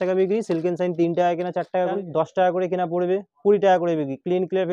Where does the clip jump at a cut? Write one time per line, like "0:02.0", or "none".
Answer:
0:02.0